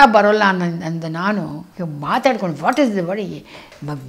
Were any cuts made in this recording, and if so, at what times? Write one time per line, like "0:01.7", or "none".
0:01.7